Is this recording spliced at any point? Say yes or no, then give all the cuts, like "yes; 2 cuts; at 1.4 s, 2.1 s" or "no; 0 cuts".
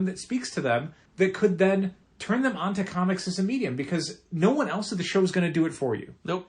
yes; 3 cuts; at 1.0 s, 2.1 s, 4.2 s